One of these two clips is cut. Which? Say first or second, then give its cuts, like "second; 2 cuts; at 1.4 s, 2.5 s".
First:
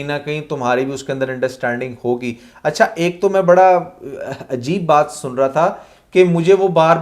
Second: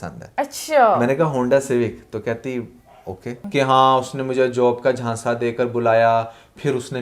second; 1 cut; at 3.4 s